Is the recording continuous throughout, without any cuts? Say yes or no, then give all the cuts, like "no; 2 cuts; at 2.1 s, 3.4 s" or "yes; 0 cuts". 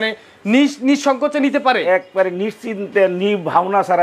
yes; 0 cuts